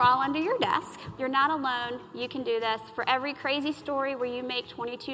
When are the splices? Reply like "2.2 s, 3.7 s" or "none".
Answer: 1.1 s